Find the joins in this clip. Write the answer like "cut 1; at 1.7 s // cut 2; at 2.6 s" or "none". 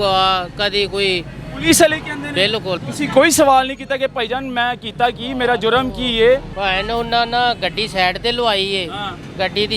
cut 1; at 2.8 s // cut 2; at 6.5 s

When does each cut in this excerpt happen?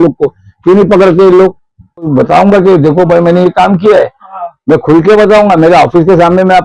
cut 1; at 2.1 s

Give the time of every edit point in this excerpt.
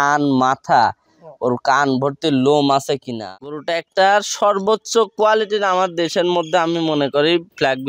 cut 1; at 3.1 s

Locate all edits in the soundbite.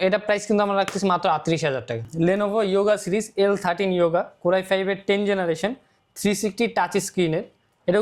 cut 1; at 2.0 s

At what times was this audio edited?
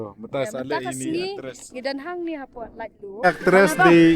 cut 1; at 3.2 s

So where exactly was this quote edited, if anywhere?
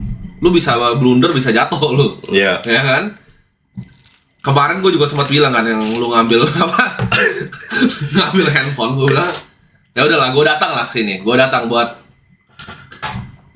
none

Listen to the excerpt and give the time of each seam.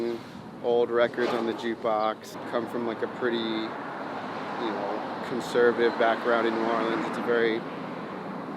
cut 1; at 2.3 s

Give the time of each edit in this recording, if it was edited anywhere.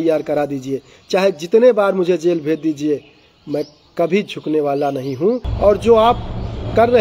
cut 1; at 5.5 s

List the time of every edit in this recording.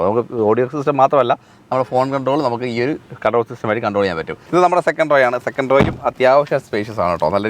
cut 1; at 4.4 s

